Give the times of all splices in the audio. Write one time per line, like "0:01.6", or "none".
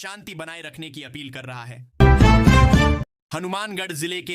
0:01.8
0:03.1